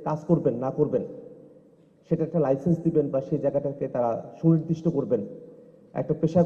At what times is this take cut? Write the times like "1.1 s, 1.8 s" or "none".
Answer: none